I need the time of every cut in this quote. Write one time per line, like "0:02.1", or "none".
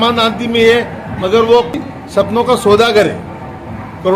0:01.8